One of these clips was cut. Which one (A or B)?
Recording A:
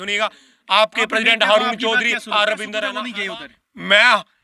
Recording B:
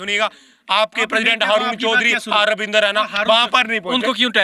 A